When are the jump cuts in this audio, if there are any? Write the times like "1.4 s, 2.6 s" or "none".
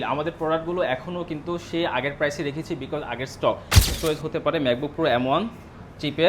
3.9 s